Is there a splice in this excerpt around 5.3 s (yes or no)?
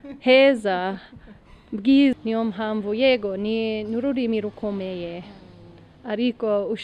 no